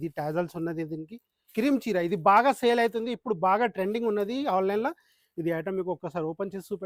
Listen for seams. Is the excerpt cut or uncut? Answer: uncut